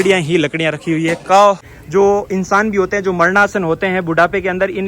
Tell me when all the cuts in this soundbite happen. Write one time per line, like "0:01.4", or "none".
0:01.7